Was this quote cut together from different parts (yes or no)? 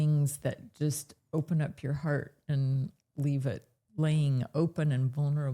yes